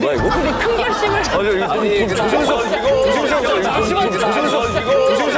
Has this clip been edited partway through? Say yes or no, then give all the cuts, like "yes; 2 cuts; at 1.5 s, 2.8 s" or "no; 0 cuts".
no; 0 cuts